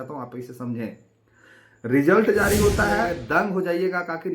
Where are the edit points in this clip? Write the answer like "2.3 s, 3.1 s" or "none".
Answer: 3.2 s